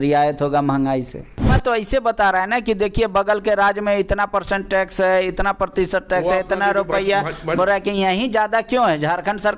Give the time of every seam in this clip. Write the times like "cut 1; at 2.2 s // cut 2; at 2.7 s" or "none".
cut 1; at 1.5 s

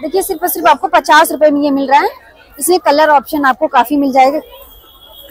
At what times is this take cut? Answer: none

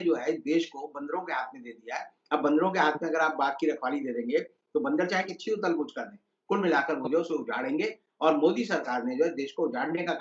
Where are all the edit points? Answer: none

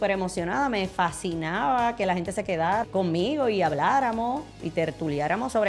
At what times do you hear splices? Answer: cut 1; at 2.8 s

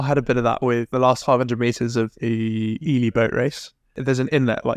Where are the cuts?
cut 1; at 0.9 s // cut 2; at 4.0 s

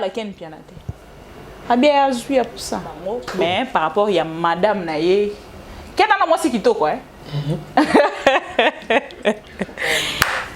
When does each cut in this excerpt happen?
cut 1; at 3.3 s

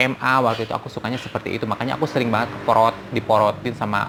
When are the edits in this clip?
none

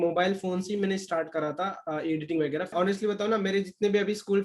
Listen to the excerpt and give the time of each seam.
cut 1; at 2.7 s

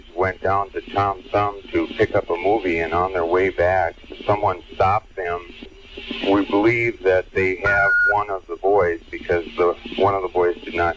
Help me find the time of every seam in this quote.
none

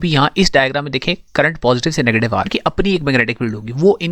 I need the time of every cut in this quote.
cut 1; at 2.5 s

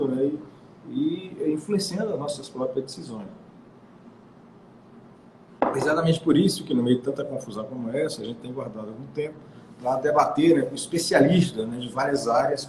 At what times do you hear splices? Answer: cut 1; at 9.0 s

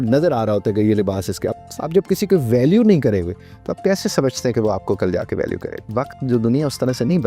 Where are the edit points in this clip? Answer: cut 1; at 1.5 s // cut 2; at 5.9 s

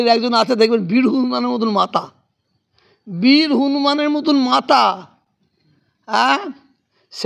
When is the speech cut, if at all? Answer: none

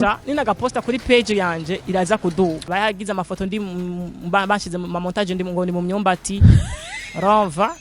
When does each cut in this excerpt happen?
cut 1; at 2.7 s

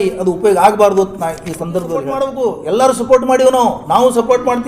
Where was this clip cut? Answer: cut 1; at 2.2 s

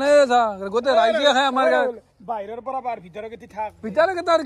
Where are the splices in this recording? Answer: none

